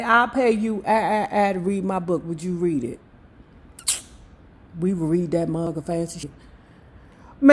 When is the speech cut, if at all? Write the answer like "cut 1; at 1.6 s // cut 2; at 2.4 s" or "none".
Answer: cut 1; at 6.3 s